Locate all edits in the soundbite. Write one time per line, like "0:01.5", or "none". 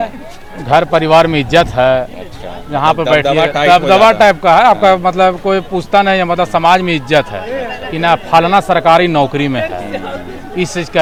none